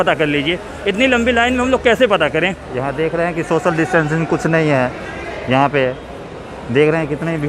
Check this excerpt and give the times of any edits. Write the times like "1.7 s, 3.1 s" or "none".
2.7 s